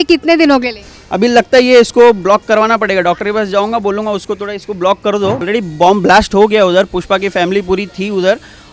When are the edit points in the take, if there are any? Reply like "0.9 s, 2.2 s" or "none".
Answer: 5.4 s